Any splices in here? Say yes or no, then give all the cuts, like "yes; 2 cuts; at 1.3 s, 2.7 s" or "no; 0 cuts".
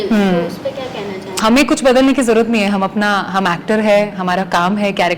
yes; 1 cut; at 1.4 s